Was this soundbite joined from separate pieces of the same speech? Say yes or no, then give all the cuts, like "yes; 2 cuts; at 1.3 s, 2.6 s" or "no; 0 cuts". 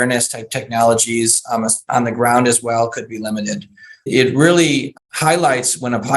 yes; 2 cuts; at 4.1 s, 4.9 s